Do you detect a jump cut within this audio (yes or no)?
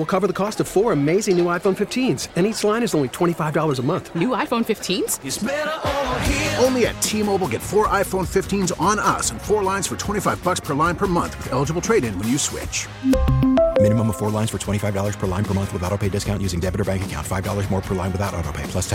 no